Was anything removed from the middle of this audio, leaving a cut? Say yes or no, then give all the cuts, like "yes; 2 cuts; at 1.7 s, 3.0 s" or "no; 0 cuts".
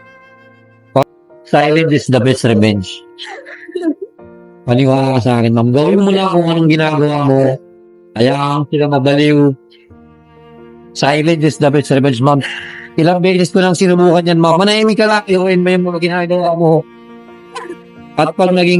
yes; 1 cut; at 1.0 s